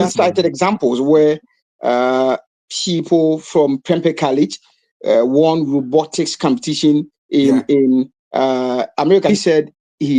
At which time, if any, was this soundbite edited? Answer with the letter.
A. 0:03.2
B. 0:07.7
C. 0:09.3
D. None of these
C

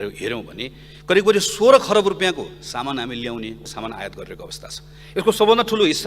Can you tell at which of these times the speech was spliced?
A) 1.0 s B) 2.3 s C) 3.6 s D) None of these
C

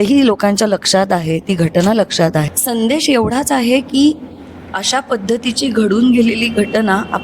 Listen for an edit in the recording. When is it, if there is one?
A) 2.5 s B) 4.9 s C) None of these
A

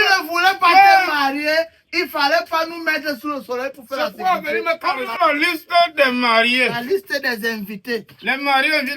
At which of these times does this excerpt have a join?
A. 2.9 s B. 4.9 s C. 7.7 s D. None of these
B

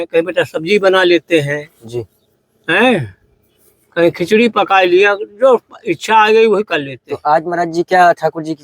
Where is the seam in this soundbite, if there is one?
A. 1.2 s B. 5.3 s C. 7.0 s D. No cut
D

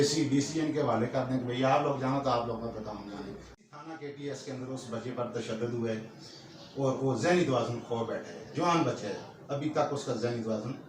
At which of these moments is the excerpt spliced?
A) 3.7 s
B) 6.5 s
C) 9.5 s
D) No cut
A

